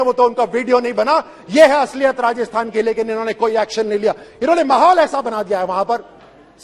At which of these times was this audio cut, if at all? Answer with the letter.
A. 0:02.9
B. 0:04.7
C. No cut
C